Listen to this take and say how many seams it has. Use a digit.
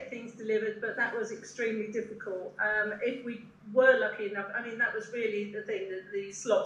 0